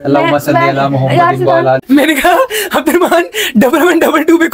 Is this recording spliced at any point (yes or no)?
yes